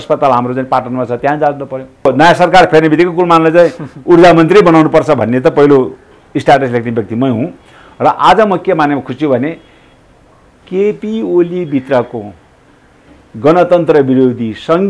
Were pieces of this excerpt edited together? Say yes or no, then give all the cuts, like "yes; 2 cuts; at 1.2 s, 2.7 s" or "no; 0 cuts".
yes; 1 cut; at 2.1 s